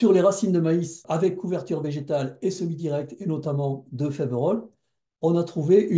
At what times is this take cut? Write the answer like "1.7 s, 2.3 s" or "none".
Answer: 1.0 s